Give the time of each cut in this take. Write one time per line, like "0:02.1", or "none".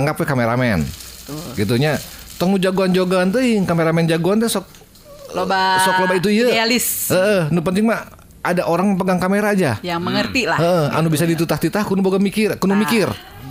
none